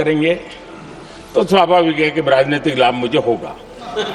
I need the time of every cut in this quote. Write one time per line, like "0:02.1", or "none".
none